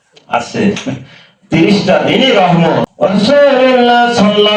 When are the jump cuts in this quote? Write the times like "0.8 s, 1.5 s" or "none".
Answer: 2.9 s